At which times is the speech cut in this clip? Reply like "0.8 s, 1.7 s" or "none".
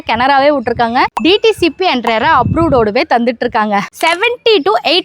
1.1 s, 3.9 s

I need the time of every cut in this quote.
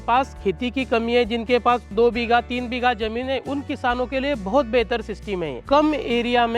1.9 s, 5.6 s

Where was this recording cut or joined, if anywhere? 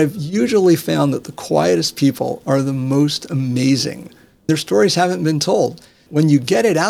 4.5 s, 6.0 s

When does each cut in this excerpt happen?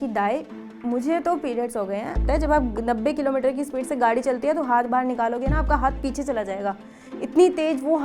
2.2 s

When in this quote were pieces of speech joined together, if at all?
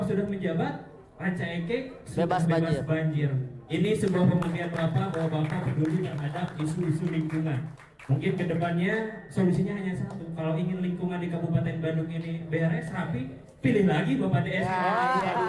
none

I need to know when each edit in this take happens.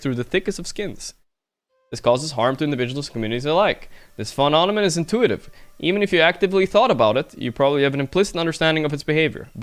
none

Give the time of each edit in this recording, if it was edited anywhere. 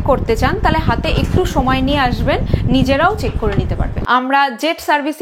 3.9 s

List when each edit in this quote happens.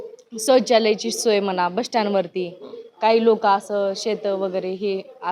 none

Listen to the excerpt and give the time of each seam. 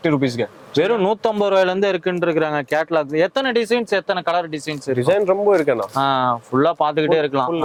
none

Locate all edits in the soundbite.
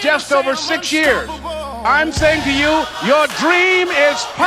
1.8 s

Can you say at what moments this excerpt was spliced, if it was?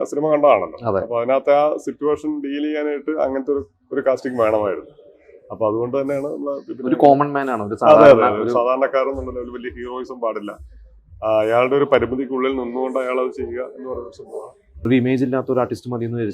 14.9 s

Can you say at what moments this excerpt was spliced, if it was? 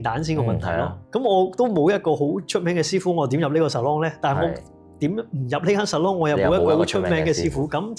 none

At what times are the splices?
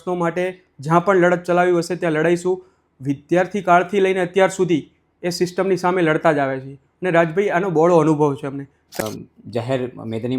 9.0 s

